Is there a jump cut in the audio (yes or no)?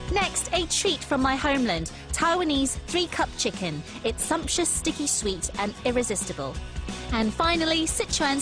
no